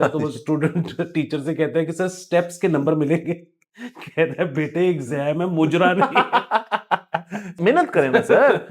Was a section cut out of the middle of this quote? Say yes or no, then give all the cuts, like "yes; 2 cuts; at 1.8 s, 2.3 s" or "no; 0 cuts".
yes; 1 cut; at 7.6 s